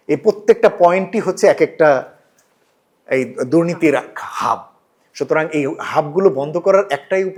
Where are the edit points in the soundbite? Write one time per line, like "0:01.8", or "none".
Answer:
none